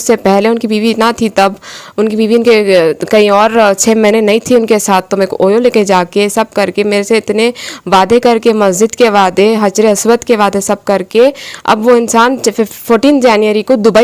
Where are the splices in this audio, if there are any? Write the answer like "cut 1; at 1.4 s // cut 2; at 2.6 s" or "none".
none